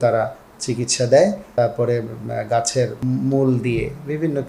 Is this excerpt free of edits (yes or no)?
no